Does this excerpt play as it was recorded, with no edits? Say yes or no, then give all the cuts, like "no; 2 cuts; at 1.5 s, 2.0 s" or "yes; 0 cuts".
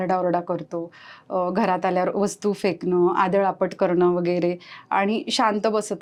yes; 0 cuts